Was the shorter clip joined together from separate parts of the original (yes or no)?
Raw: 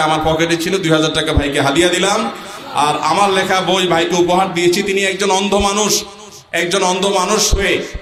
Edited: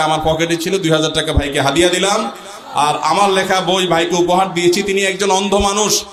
no